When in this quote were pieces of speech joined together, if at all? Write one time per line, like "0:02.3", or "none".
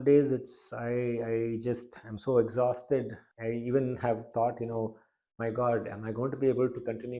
none